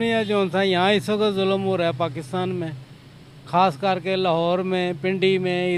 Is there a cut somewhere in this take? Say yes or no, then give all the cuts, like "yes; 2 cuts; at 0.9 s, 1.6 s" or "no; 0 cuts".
no; 0 cuts